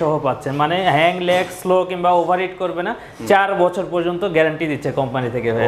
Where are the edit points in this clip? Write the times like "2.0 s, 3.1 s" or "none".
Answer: none